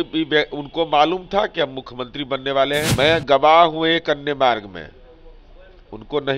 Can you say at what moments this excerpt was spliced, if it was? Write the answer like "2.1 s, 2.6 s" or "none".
2.9 s